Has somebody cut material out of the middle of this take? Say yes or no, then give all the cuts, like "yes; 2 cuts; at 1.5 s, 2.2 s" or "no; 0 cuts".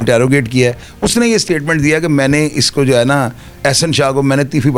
no; 0 cuts